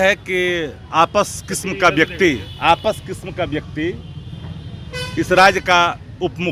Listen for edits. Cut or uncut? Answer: uncut